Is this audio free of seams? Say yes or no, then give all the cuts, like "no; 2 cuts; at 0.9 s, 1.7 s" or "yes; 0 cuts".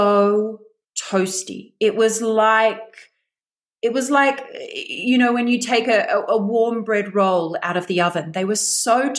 yes; 0 cuts